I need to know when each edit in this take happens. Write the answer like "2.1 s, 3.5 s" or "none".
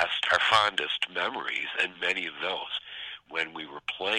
3.2 s